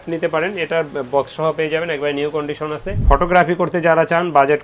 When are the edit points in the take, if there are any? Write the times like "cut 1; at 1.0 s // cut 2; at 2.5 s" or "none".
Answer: cut 1; at 3.0 s